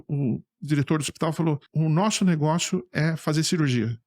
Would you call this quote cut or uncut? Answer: cut